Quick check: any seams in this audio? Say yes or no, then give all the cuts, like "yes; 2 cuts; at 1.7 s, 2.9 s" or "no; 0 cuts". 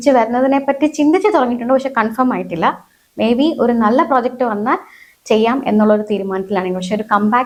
no; 0 cuts